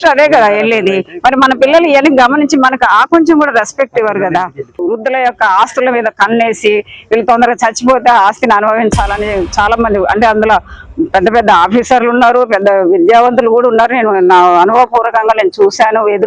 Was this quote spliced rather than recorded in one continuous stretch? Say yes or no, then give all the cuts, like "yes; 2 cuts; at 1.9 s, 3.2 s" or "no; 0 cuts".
yes; 1 cut; at 5.0 s